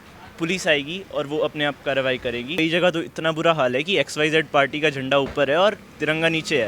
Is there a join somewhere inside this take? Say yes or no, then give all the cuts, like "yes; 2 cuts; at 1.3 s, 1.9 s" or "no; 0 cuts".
yes; 1 cut; at 2.5 s